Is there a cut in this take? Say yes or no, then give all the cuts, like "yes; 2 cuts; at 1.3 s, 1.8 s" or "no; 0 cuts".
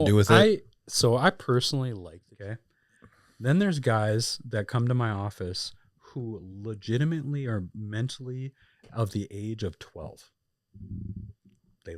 yes; 1 cut; at 1.9 s